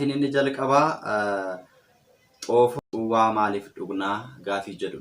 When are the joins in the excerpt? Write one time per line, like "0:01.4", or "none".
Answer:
0:02.8